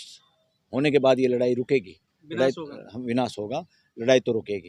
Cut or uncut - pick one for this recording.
uncut